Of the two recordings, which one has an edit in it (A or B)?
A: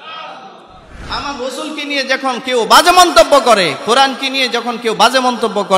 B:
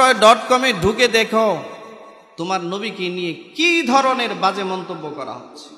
A